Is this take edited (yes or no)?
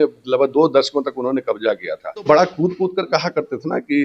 yes